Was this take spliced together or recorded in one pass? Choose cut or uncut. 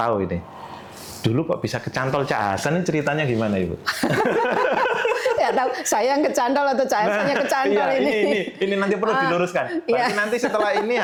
uncut